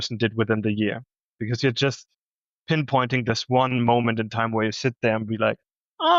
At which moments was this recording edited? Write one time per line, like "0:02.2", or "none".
0:01.3